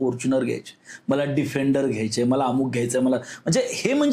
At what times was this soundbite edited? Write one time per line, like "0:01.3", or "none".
none